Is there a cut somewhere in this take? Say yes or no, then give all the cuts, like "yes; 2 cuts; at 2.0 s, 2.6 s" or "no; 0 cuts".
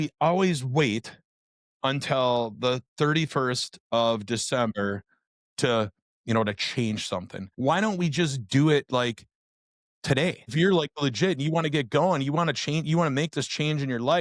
yes; 2 cuts; at 7.4 s, 10.5 s